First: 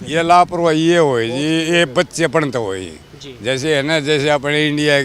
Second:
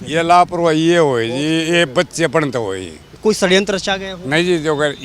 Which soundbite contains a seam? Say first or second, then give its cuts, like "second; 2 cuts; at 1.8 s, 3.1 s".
second; 1 cut; at 3.1 s